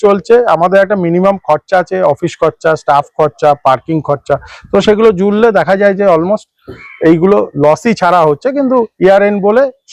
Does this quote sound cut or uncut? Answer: uncut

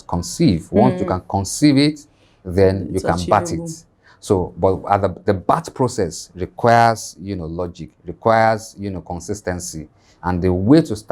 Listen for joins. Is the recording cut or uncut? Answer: uncut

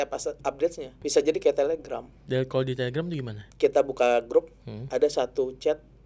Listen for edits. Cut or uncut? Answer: cut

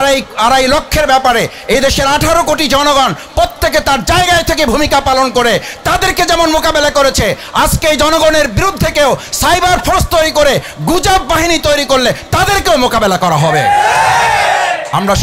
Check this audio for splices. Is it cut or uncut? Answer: uncut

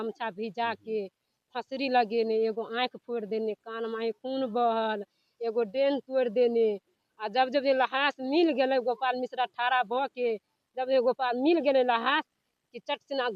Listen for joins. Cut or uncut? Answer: uncut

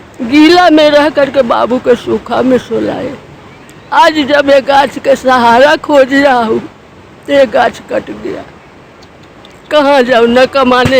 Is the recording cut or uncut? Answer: uncut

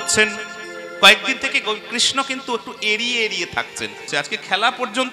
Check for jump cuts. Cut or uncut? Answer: cut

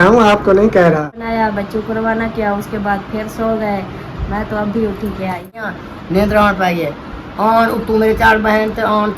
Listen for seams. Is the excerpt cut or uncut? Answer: cut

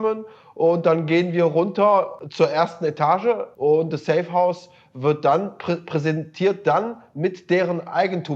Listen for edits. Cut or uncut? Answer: cut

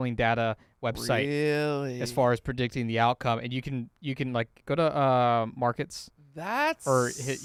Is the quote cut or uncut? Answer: uncut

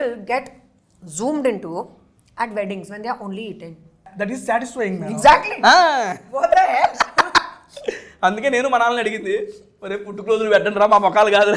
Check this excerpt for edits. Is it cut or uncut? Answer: cut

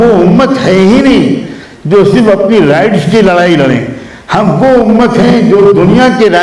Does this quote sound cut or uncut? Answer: uncut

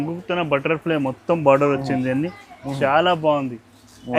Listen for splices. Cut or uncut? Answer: uncut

